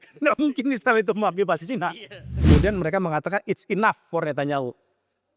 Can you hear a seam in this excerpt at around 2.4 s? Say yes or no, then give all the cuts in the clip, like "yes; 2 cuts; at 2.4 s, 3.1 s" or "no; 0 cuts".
yes; 1 cut; at 2.4 s